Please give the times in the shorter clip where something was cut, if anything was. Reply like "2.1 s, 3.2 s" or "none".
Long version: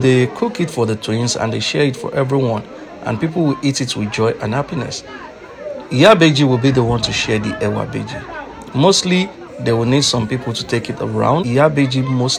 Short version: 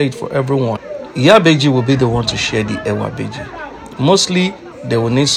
0.9 s

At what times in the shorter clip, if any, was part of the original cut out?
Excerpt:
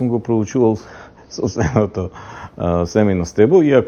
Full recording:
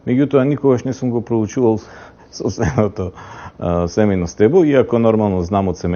none

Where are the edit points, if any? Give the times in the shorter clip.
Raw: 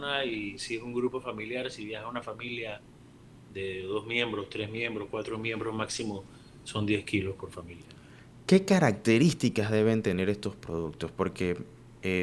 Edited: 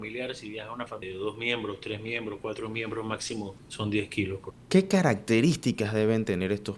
1.0 s, 3.6 s, 4.5 s

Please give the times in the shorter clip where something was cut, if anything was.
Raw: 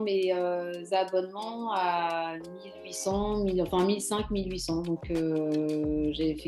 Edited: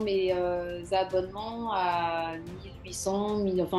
none

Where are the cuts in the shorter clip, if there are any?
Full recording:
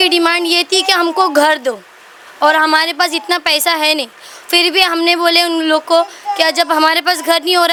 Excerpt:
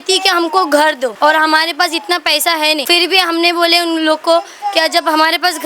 1.1 s, 2.8 s

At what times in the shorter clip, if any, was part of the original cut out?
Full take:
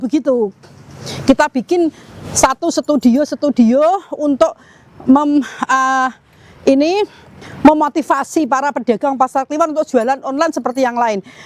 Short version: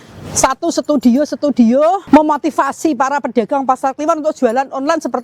2.0 s

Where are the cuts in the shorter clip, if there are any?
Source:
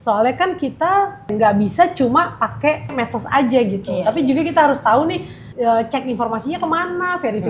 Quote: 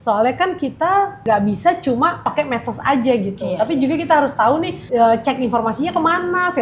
1.2 s, 2.4 s, 4.8 s

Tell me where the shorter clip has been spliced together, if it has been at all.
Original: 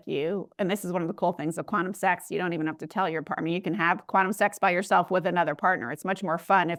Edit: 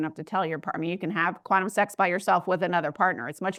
none

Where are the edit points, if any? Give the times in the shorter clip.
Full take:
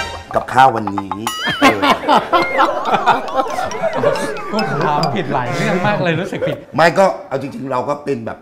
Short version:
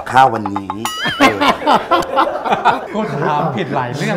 2.8 s

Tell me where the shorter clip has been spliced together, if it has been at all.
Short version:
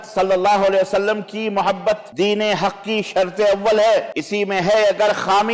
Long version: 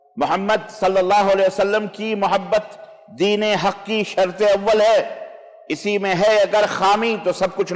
2.1 s, 4.2 s

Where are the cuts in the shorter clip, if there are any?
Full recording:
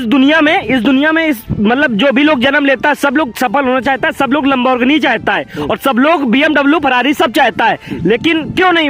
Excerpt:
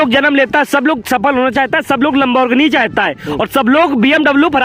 none

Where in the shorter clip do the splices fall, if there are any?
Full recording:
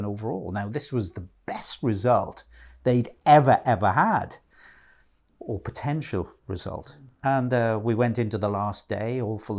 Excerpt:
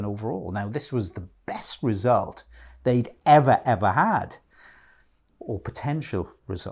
none

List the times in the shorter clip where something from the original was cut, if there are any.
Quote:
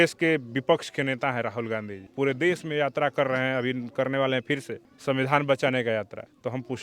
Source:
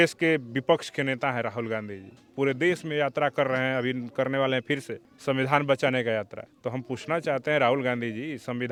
2.0 s

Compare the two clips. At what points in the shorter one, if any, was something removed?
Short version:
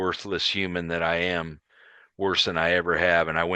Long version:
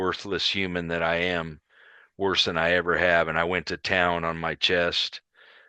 none

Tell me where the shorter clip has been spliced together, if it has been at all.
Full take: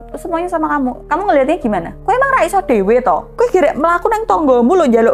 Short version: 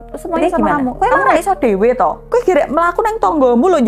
0.9 s

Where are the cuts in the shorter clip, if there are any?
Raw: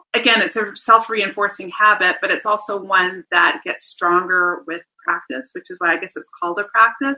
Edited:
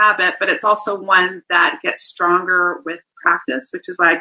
none

